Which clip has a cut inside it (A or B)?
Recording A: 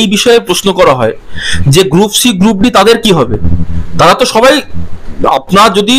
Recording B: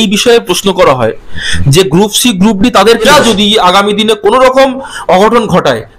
B